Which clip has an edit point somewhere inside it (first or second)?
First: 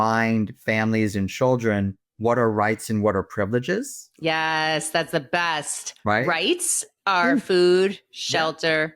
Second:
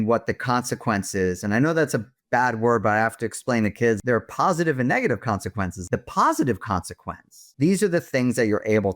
second